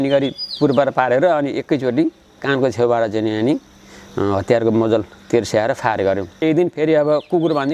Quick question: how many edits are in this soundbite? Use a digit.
1